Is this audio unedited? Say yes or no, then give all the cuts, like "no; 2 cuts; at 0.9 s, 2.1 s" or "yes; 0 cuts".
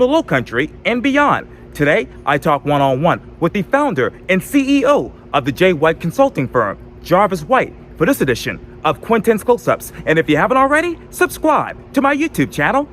yes; 0 cuts